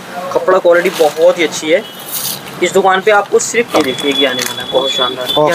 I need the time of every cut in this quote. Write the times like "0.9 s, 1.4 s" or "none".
3.7 s